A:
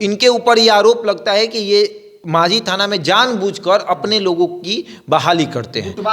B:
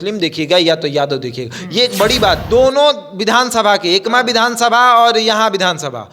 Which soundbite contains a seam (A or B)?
B